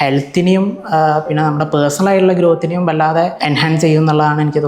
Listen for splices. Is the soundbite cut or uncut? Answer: cut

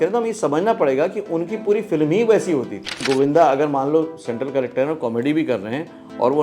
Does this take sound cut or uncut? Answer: cut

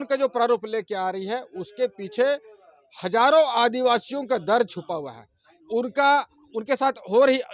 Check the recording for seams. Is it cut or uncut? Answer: uncut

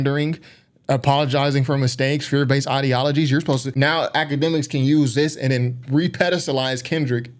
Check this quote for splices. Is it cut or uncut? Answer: cut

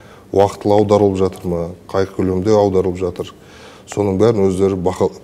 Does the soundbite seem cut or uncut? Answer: uncut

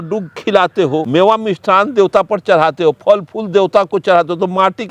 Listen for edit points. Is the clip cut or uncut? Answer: cut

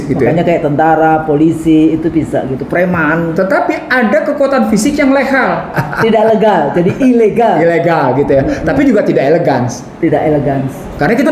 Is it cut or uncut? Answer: cut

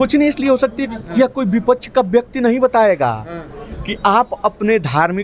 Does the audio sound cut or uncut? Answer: uncut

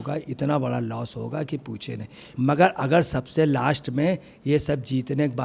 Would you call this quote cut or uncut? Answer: cut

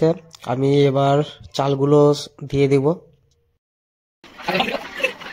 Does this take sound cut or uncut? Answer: uncut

